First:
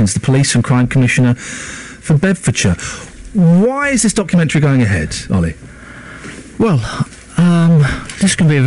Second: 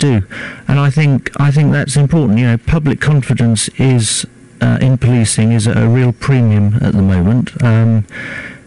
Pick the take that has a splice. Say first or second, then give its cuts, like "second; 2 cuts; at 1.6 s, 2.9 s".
first; 1 cut; at 3.8 s